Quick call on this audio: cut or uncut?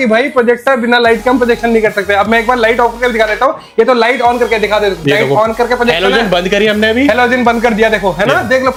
uncut